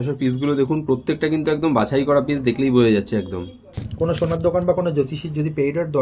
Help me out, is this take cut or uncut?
cut